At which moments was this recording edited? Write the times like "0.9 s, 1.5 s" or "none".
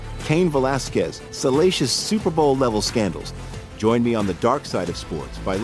none